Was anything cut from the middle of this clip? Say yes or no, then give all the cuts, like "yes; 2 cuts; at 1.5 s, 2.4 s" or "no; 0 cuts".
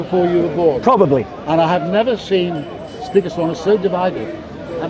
no; 0 cuts